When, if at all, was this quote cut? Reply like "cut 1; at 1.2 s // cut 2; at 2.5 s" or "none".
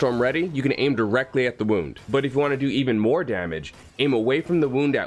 cut 1; at 2.0 s